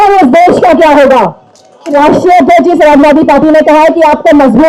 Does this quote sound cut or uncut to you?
cut